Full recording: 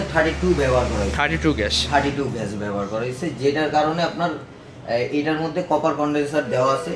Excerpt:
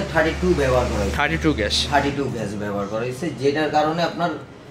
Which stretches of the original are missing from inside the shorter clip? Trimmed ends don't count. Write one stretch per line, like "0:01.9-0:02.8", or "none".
none